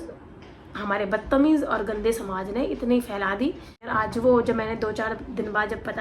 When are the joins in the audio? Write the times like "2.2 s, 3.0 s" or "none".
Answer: 3.9 s